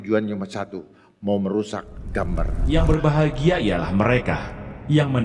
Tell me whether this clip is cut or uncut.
cut